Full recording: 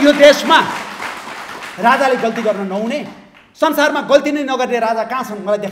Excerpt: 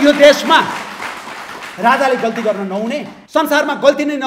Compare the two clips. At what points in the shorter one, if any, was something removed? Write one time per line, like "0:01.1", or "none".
0:03.1